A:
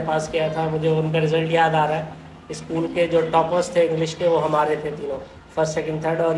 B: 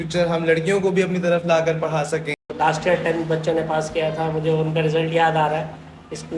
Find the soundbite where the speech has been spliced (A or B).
B